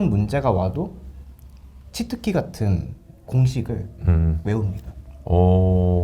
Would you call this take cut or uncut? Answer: uncut